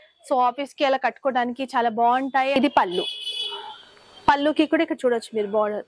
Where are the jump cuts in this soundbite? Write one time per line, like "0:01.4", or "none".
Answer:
0:02.6